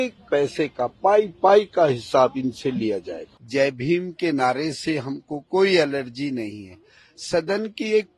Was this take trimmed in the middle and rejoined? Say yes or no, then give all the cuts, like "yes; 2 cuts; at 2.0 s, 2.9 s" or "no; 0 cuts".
no; 0 cuts